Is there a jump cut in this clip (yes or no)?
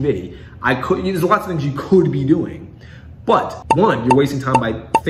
yes